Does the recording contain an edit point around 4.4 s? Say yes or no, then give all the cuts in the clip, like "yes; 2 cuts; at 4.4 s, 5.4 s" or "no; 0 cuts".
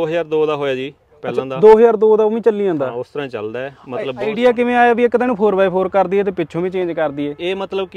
yes; 1 cut; at 4.4 s